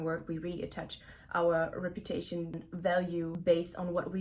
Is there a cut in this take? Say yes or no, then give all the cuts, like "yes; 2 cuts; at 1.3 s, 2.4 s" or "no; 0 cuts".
yes; 1 cut; at 2.8 s